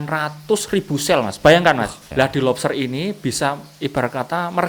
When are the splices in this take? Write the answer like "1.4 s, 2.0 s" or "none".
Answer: 2.0 s

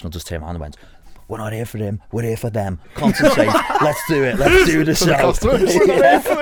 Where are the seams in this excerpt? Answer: none

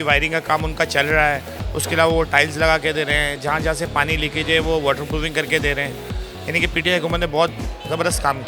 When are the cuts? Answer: none

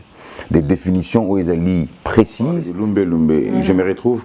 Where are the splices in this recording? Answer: 2.7 s

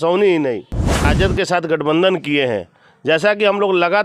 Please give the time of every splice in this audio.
1.1 s

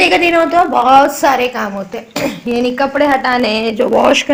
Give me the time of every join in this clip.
none

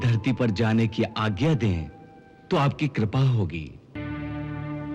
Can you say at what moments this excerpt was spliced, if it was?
4.0 s

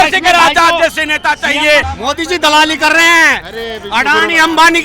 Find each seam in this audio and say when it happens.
1.9 s

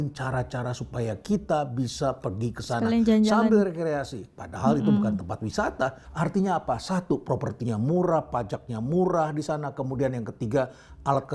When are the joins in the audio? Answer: 6.0 s

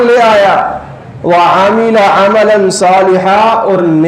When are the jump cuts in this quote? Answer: none

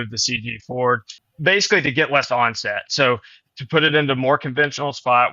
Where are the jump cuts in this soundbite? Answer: 1.1 s

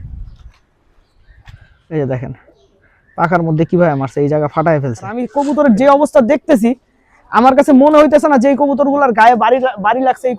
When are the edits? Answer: 1.5 s, 5.3 s

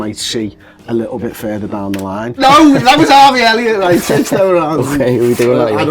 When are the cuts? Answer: 2.4 s

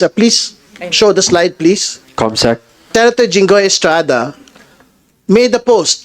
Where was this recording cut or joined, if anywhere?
2.8 s

